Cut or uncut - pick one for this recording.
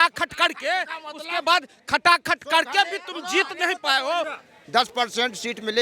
cut